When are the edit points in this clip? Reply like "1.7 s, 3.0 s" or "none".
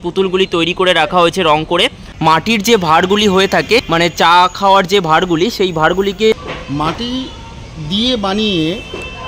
2.1 s, 3.9 s, 6.4 s